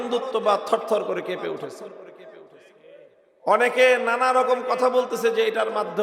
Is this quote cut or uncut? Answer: uncut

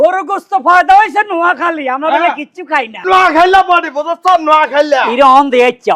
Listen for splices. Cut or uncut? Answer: cut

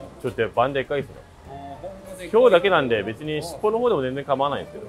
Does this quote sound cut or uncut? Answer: uncut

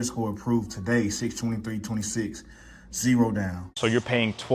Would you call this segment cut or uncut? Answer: cut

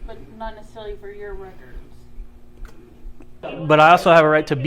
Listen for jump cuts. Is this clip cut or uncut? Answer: cut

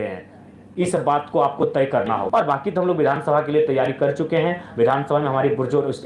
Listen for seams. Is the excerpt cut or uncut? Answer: cut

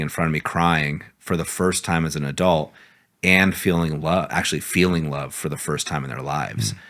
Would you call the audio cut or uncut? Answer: uncut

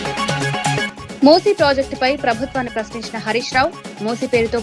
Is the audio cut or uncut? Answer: cut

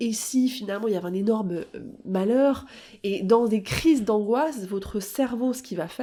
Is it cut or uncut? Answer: uncut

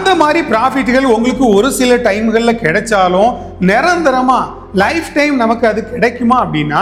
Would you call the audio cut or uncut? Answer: uncut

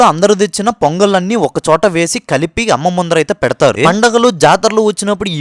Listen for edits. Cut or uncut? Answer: cut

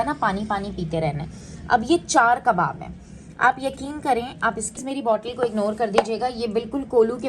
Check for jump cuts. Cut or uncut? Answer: cut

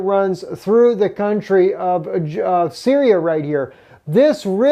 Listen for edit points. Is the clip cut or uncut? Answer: cut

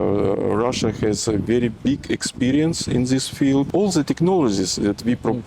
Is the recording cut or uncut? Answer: cut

